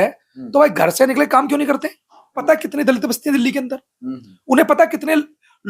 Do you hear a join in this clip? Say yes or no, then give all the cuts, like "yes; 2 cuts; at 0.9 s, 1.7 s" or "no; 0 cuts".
yes; 1 cut; at 2.4 s